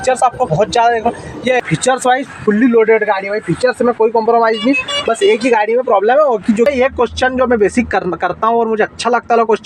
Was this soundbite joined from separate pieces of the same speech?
yes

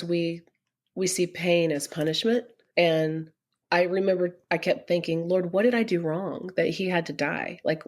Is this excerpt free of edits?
no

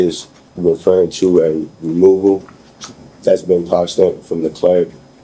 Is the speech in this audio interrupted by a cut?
no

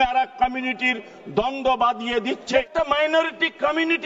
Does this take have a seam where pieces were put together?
yes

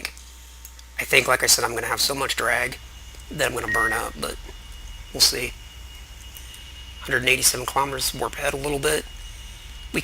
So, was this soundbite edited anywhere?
yes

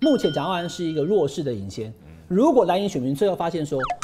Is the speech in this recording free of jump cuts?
yes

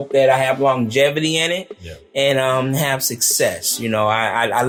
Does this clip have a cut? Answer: no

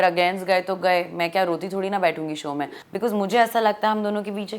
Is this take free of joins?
no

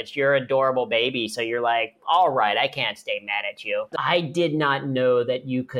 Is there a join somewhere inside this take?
yes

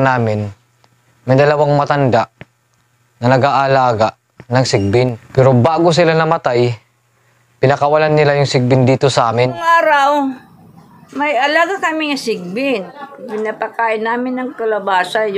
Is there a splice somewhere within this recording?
yes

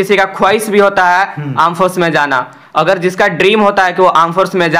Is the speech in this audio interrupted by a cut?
no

